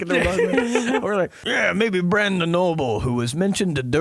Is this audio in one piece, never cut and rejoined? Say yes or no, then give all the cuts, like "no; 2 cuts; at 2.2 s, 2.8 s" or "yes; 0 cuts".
no; 1 cut; at 1.4 s